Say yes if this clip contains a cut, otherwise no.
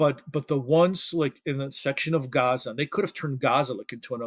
no